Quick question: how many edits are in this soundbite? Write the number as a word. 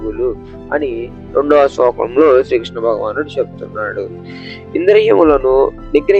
zero